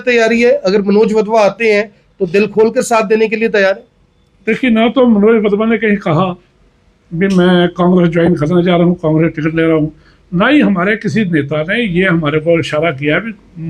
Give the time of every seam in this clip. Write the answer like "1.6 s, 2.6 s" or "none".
none